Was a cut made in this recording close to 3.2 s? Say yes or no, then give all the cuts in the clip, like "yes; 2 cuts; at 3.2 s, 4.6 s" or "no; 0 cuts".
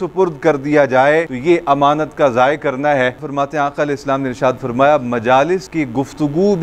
yes; 3 cuts; at 1.3 s, 3.2 s, 5.7 s